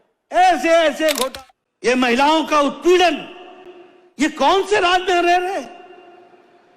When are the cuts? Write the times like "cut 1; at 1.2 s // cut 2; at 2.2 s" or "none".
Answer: cut 1; at 1.2 s